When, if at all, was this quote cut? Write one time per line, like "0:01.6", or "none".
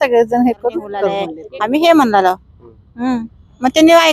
0:01.4